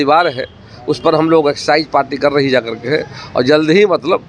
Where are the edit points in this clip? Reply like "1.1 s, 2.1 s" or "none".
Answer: none

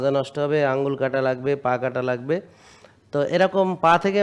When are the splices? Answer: none

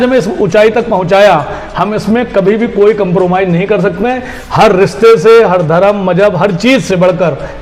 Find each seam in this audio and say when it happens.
none

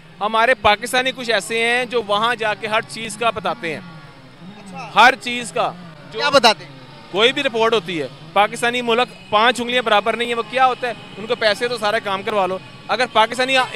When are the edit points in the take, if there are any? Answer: none

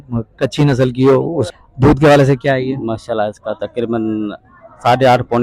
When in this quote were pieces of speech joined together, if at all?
1.5 s

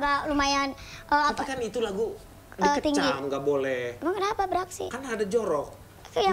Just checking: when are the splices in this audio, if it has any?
none

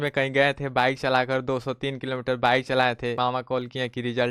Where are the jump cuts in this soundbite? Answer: 3.2 s

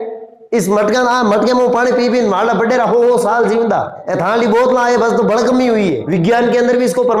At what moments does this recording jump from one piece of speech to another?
4.0 s, 6.0 s

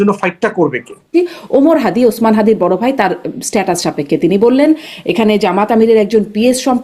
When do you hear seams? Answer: 1.1 s

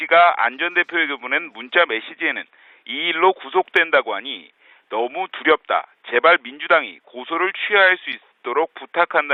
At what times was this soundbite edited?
none

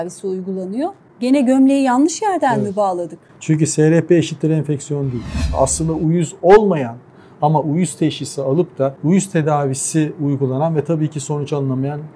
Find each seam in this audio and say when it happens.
1.0 s, 5.5 s, 9.0 s

